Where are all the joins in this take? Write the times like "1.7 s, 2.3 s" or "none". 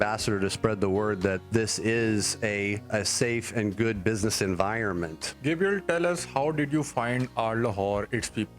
1.4 s, 2.9 s, 5.2 s

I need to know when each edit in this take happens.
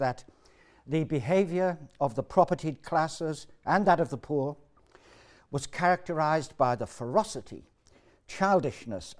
2.6 s

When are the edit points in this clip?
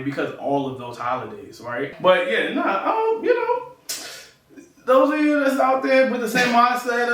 1.9 s

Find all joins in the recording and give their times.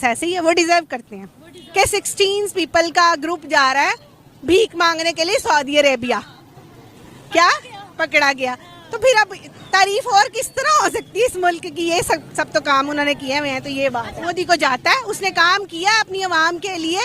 1.6 s, 14.2 s

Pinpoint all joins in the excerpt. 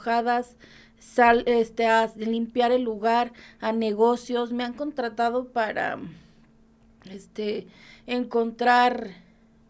none

